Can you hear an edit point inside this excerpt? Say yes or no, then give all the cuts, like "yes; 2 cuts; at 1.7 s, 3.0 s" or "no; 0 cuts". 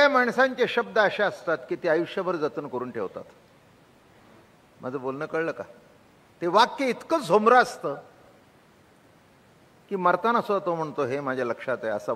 no; 0 cuts